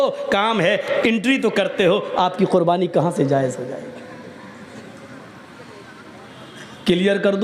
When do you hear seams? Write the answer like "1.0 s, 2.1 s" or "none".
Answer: 4.7 s